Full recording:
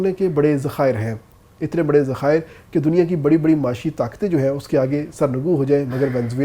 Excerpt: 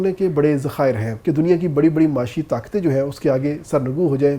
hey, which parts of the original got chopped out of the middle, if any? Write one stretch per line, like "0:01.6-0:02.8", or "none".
0:01.1-0:02.6